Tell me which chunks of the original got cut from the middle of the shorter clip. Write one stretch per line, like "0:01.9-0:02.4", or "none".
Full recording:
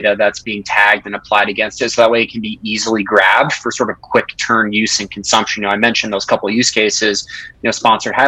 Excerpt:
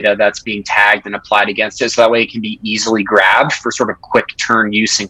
none